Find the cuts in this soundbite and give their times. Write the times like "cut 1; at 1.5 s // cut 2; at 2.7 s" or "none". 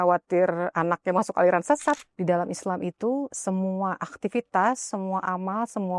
cut 1; at 2.0 s